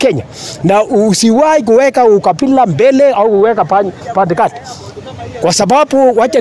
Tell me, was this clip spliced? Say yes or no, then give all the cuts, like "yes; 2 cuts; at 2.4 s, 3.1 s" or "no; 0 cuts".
no; 0 cuts